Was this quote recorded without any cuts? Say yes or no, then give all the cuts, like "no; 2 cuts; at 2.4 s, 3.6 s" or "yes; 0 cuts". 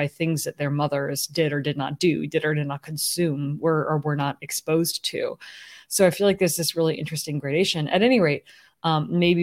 yes; 0 cuts